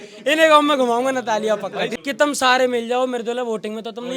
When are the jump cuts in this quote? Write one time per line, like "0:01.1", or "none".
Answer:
0:01.9